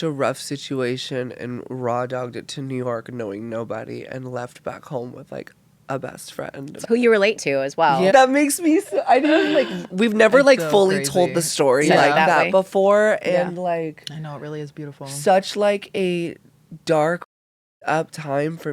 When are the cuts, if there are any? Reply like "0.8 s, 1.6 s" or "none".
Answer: 6.6 s, 8.1 s